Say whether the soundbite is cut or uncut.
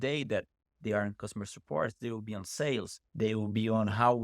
cut